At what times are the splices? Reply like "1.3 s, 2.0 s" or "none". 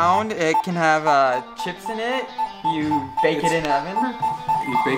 none